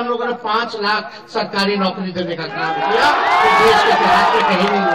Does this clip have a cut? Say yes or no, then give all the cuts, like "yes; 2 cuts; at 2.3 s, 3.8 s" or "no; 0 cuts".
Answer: no; 0 cuts